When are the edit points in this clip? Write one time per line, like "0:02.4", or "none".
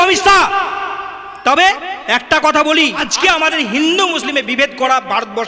0:03.1

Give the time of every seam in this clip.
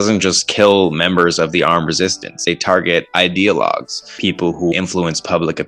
0:02.4
0:04.5

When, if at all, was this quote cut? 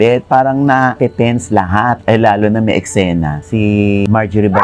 none

